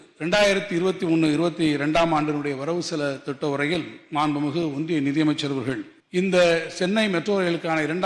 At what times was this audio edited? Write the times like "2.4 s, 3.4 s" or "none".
5.9 s